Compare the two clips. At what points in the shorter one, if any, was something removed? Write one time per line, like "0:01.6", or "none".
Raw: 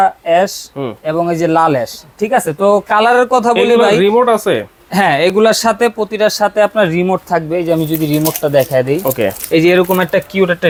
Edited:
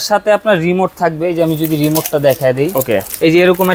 none